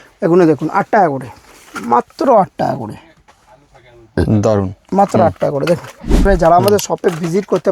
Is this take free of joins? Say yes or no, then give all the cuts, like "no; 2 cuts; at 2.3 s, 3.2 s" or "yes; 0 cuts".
no; 1 cut; at 6.2 s